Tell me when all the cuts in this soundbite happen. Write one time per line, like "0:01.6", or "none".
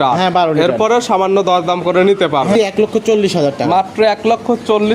0:02.5